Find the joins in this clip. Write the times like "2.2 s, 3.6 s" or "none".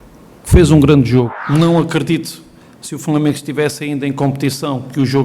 1.4 s